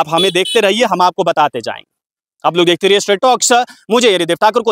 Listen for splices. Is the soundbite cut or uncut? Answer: uncut